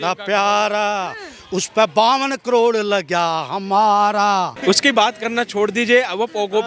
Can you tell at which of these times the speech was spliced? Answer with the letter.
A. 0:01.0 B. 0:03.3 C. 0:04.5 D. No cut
C